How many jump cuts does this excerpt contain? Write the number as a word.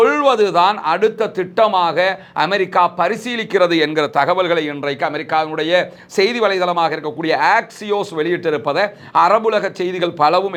zero